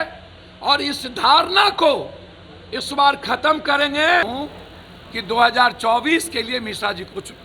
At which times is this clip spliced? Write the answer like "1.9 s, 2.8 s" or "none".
4.3 s